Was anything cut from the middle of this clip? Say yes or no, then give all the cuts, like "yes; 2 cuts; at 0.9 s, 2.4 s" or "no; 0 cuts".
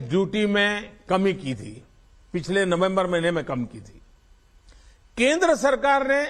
no; 0 cuts